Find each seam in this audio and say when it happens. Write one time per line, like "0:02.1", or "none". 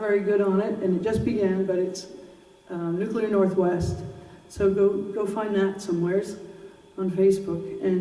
0:05.3